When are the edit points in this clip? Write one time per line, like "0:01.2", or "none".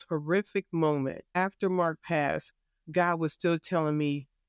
none